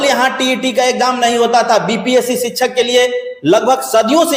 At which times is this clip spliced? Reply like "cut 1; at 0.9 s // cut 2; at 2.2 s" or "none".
none